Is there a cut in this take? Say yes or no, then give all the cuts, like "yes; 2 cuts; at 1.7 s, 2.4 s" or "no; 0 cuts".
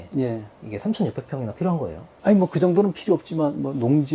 yes; 1 cut; at 2.0 s